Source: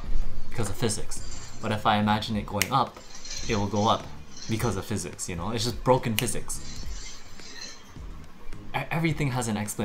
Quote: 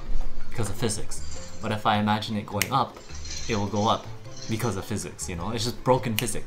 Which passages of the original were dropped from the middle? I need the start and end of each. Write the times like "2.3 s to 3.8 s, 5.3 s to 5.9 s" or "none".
none